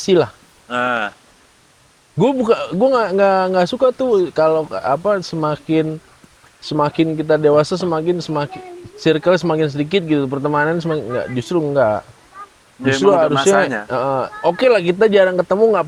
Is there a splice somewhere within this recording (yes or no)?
no